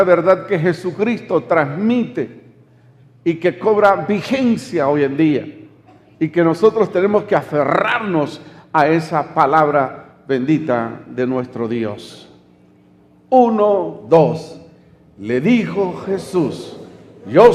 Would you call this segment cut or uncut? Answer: cut